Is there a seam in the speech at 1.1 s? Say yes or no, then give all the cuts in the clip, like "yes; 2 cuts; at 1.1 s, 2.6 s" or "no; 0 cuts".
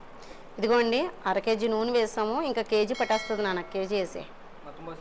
no; 0 cuts